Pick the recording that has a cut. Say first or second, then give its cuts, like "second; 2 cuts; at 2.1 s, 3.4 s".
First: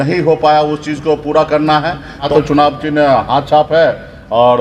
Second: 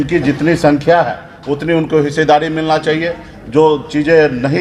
first; 1 cut; at 2.3 s